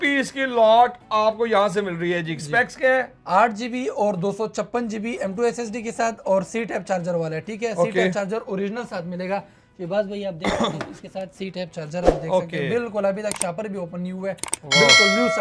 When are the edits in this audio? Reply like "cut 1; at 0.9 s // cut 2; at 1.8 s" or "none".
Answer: none

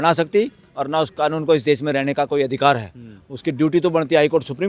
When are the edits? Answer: none

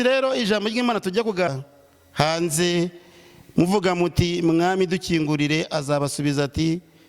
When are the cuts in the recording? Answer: cut 1; at 1.5 s

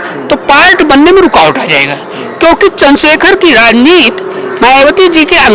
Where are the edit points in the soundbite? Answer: none

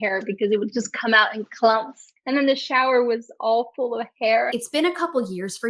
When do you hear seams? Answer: cut 1; at 4.5 s

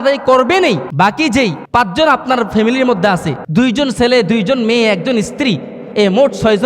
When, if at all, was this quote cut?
cut 1; at 1.4 s // cut 2; at 3.4 s

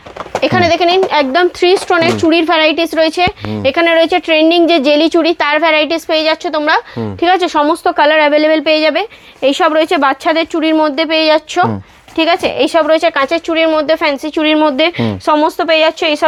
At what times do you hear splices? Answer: none

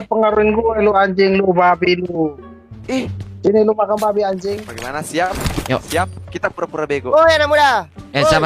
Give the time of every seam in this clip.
cut 1; at 4.5 s

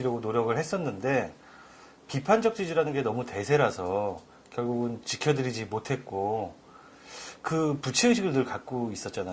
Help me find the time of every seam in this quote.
cut 1; at 5.1 s

